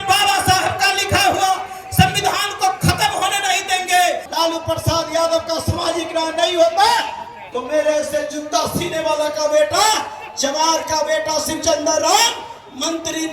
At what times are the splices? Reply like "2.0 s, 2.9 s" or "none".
4.3 s

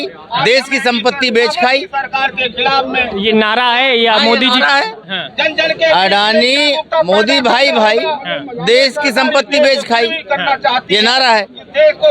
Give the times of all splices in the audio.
none

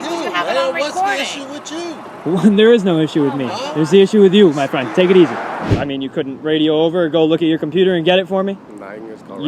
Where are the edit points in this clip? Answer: 5.7 s

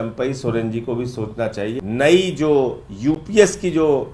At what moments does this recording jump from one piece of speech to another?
1.8 s

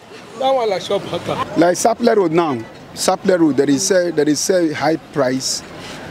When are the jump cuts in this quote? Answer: 1.4 s

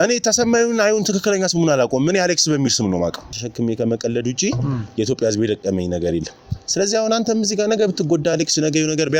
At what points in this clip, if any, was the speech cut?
3.4 s

